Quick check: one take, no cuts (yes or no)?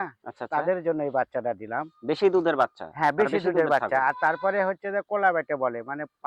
yes